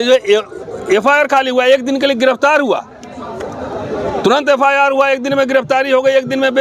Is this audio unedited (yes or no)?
yes